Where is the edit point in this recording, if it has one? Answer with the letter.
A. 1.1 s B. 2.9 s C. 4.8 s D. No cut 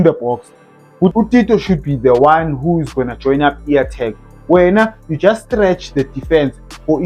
A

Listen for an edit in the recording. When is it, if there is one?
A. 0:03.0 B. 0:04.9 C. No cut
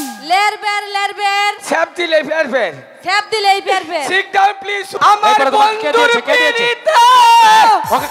B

